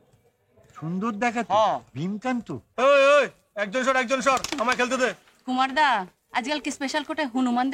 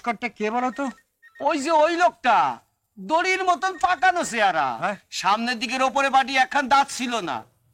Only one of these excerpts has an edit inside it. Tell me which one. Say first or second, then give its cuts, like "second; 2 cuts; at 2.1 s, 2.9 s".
first; 1 cut; at 2.6 s